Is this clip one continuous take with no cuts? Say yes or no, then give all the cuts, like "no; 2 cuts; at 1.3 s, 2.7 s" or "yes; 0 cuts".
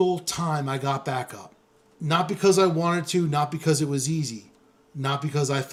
yes; 0 cuts